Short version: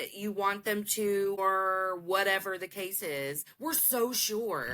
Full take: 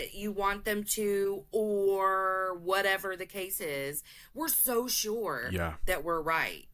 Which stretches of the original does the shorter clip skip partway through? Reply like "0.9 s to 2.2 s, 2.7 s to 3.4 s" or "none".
1.4 s to 2.0 s, 4.0 s to 4.2 s